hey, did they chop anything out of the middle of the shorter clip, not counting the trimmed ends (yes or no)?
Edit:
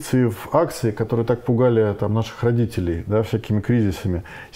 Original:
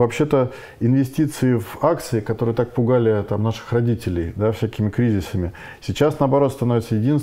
no